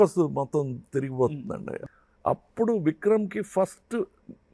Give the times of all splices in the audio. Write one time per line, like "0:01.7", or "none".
0:01.8

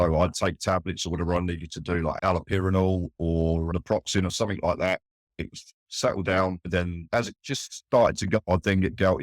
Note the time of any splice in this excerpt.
0:02.2
0:03.7
0:07.1
0:08.4

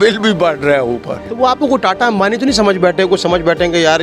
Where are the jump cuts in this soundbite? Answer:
none

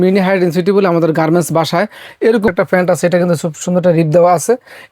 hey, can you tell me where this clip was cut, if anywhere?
0:02.5

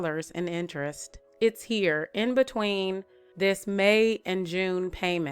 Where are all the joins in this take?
0:01.2

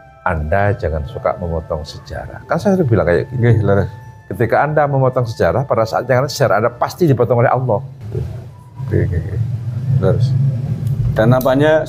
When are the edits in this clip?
0:08.0
0:10.7

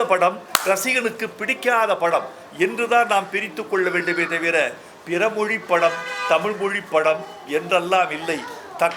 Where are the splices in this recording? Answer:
none

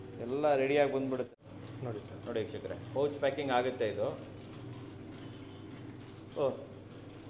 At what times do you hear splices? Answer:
0:01.5

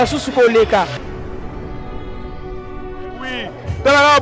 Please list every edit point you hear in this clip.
0:01.0
0:02.6

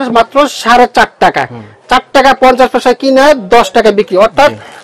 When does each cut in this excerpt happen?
none

